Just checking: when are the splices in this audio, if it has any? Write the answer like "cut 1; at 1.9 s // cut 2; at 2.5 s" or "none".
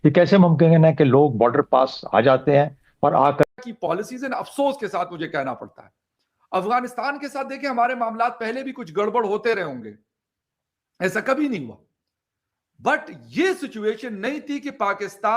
cut 1; at 3.6 s